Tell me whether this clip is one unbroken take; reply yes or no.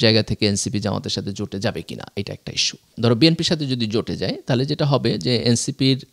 no